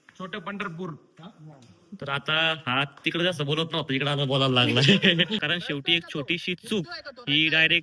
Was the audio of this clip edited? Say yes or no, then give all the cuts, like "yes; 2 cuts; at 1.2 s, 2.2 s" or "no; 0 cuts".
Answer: yes; 1 cut; at 5.4 s